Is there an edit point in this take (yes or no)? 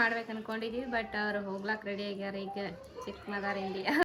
no